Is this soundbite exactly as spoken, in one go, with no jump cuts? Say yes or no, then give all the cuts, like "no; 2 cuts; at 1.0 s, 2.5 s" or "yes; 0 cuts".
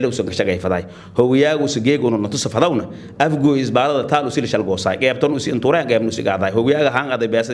yes; 0 cuts